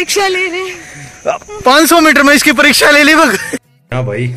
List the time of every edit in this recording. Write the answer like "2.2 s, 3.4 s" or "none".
3.5 s